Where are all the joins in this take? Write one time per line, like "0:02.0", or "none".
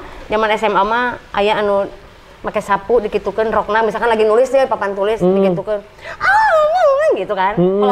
none